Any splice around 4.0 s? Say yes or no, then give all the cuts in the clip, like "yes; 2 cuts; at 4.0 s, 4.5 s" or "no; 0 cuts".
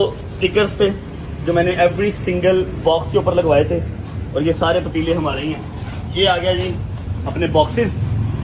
no; 0 cuts